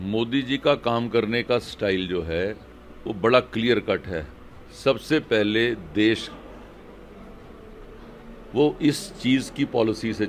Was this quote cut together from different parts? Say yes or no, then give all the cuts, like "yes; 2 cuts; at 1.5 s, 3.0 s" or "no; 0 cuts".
no; 0 cuts